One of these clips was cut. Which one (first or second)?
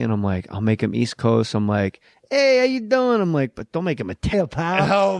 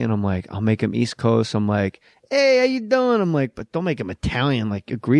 second